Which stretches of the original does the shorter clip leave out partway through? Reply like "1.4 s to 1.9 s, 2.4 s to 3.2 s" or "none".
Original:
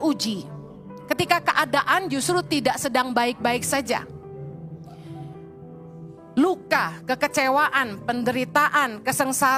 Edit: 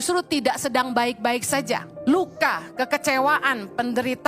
4.1 s to 6.2 s

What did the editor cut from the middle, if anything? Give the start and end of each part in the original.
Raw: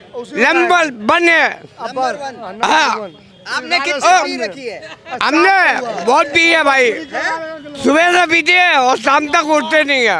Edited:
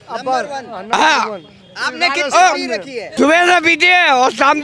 4.7 s to 7.6 s

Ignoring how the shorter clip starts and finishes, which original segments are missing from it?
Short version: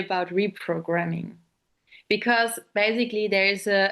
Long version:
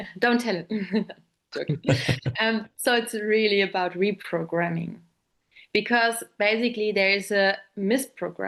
none

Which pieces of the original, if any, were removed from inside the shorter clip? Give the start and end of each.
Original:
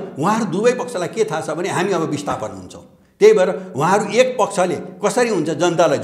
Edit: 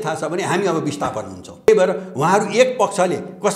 2.9 s to 3.3 s

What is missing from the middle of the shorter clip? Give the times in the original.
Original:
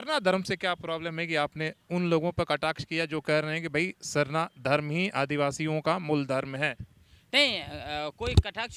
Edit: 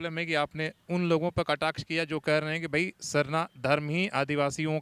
none

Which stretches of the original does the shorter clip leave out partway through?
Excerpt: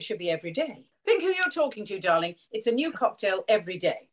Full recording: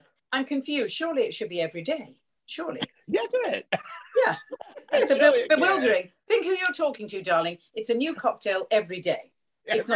2.2 s to 6.2 s

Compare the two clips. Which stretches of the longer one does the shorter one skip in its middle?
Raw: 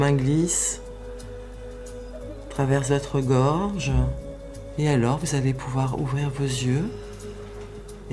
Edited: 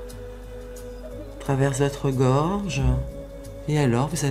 none

